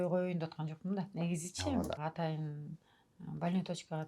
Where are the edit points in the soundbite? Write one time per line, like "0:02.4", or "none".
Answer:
0:02.0